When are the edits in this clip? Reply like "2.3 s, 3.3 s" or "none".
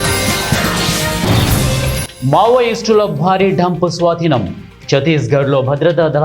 1.8 s